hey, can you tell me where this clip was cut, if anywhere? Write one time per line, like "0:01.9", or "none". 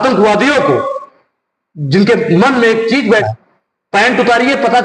0:03.2